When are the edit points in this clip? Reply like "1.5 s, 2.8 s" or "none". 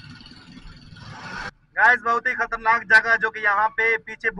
1.5 s